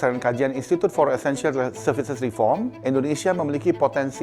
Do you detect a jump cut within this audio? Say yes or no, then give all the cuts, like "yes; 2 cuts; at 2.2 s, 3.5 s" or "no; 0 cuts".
yes; 1 cut; at 2.8 s